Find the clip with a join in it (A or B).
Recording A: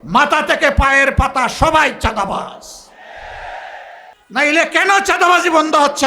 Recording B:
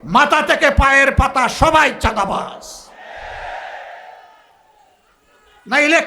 A